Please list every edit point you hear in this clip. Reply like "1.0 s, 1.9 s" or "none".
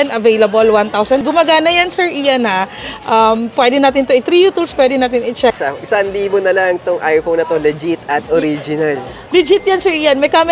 1.2 s, 5.7 s